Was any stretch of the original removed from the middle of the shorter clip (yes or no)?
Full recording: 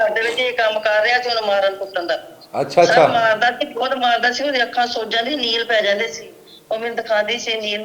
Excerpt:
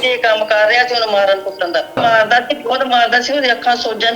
yes